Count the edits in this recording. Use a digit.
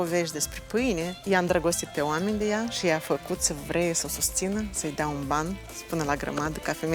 2